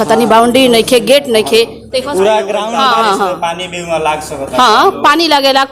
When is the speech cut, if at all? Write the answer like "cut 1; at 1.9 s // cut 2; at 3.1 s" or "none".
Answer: cut 1; at 2.6 s